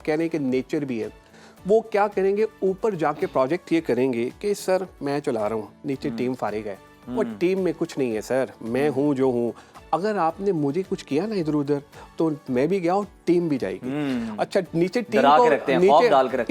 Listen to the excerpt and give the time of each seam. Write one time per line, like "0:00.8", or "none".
none